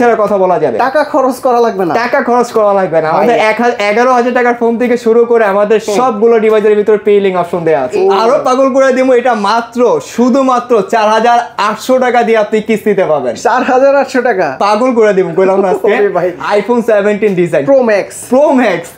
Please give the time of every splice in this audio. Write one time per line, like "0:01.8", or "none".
0:07.9
0:16.4